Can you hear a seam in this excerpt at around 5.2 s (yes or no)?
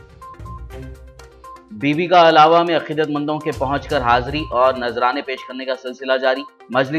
no